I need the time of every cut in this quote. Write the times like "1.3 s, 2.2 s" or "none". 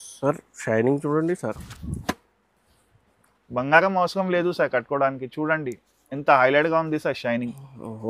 none